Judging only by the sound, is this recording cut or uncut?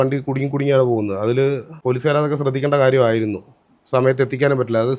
uncut